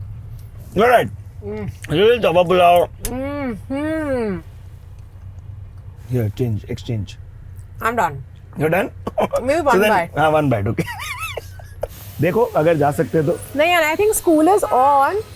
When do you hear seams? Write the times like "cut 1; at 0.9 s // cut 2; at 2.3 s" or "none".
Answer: cut 1; at 4.4 s // cut 2; at 5.9 s // cut 3; at 12.0 s